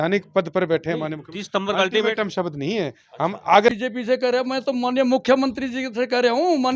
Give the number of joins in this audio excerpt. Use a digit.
1